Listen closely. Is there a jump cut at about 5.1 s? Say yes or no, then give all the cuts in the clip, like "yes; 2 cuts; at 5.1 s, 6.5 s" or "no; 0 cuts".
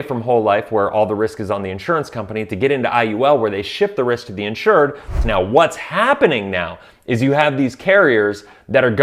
yes; 1 cut; at 5.1 s